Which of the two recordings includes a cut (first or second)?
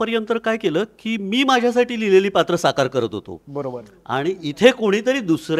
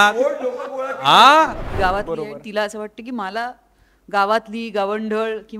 second